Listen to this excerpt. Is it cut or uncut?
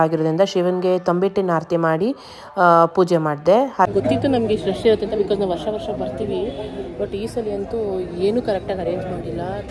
cut